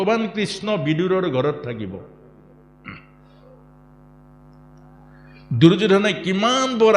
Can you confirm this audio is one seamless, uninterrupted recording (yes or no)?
yes